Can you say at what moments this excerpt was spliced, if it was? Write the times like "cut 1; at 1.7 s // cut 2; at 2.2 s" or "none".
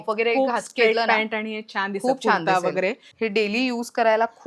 cut 1; at 3.1 s